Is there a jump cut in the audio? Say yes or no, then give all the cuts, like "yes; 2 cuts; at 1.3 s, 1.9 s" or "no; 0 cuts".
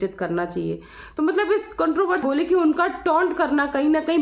yes; 1 cut; at 2.2 s